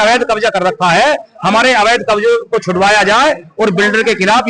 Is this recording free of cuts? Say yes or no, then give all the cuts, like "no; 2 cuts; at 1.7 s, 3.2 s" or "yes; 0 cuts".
yes; 0 cuts